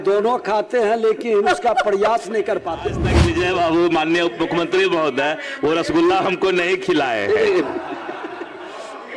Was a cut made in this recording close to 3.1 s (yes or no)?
yes